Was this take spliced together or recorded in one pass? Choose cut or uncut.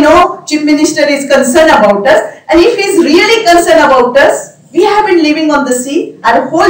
uncut